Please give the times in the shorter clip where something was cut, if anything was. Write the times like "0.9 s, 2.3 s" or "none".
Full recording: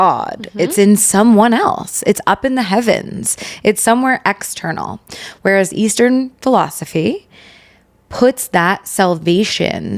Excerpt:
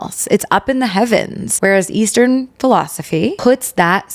1.4 s, 3.4 s